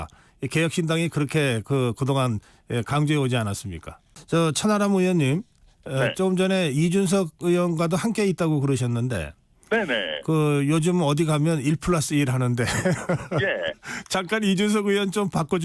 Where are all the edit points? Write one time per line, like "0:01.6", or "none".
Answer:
0:04.0